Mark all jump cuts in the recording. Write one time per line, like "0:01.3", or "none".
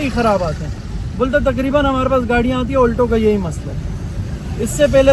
none